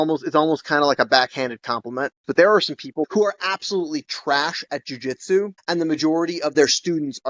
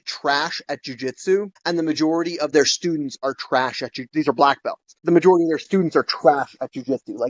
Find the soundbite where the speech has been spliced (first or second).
first